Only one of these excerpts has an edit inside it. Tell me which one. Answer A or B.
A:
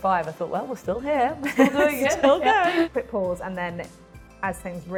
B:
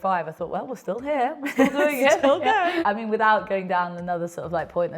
B